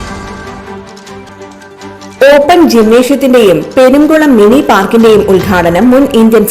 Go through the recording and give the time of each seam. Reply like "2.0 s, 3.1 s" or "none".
1.2 s